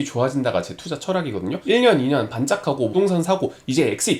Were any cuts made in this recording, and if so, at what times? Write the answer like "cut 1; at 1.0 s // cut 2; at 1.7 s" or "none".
cut 1; at 1.6 s // cut 2; at 2.9 s